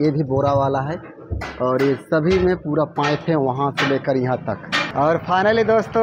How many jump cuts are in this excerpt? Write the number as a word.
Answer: one